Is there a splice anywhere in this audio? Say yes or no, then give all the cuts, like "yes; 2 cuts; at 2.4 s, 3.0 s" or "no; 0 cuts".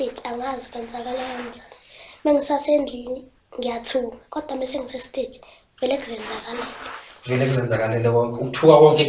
no; 0 cuts